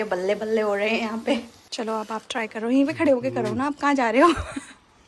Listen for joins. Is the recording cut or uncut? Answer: cut